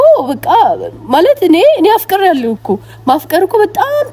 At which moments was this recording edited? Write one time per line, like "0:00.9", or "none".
none